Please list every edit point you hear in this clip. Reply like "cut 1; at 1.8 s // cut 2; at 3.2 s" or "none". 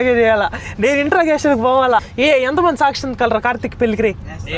cut 1; at 2.1 s